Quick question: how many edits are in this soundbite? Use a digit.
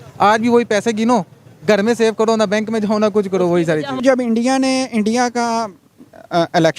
1